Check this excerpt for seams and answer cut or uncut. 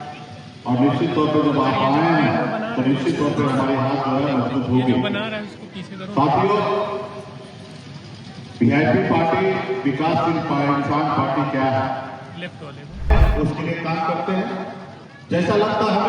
cut